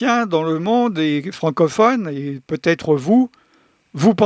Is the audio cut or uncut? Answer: uncut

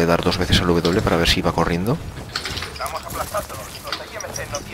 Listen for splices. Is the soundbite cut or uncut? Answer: cut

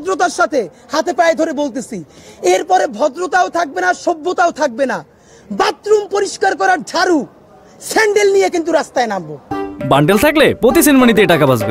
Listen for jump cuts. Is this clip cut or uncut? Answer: uncut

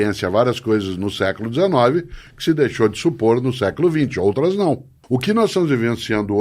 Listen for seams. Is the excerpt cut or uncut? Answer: cut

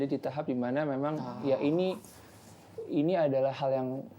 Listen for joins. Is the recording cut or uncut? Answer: uncut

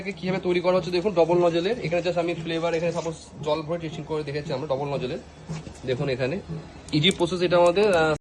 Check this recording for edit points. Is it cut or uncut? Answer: uncut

